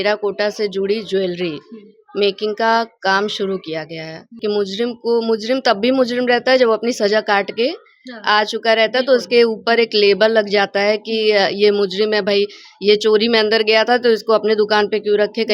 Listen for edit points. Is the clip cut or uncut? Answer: cut